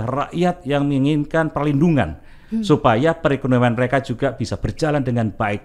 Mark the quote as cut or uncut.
uncut